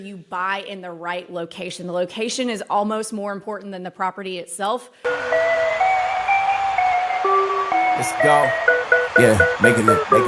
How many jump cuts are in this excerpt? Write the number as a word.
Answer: one